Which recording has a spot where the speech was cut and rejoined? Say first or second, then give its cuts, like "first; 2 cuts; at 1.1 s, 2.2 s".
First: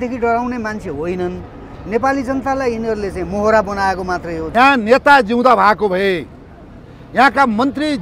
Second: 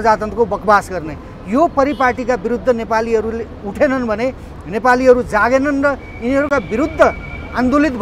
first; 1 cut; at 4.4 s